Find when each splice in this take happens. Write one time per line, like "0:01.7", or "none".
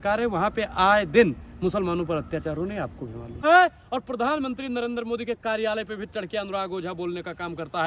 0:03.4

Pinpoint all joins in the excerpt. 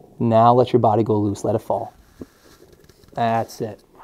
none

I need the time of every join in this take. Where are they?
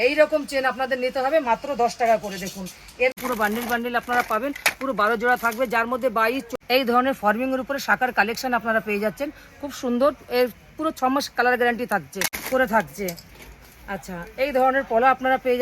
0:03.1
0:06.5
0:12.4

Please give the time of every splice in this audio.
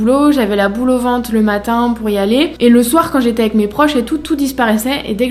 none

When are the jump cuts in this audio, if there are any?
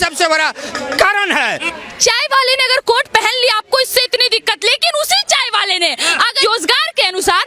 0:01.7
0:06.4

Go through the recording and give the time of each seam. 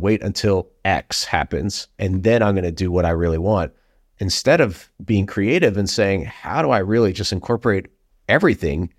0:01.8

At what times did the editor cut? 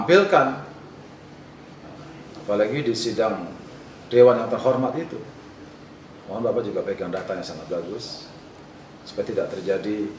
none

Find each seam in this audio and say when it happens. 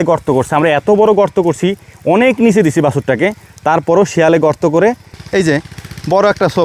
0:05.1

